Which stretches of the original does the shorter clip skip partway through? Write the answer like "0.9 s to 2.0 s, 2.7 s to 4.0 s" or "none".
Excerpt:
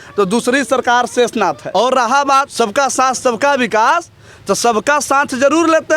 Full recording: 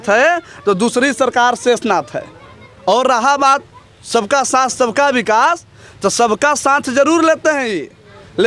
2.1 s to 2.8 s, 3.6 s to 4.0 s